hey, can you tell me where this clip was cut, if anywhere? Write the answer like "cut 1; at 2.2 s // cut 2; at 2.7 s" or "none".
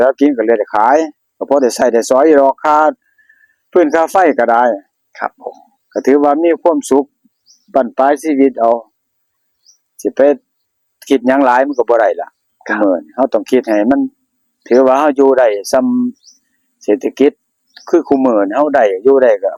none